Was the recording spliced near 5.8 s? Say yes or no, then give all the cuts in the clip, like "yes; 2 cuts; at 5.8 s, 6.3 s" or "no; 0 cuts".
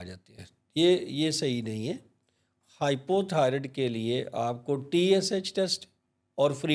no; 0 cuts